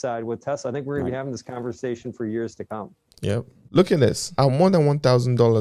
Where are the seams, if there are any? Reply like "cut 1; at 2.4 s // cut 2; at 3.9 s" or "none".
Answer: cut 1; at 3.2 s